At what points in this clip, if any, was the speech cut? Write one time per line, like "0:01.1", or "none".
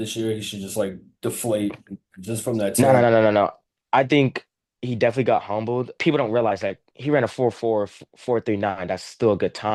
0:05.9